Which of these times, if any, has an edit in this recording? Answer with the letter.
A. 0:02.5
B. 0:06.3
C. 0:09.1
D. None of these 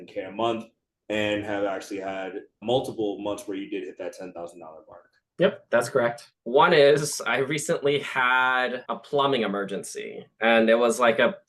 B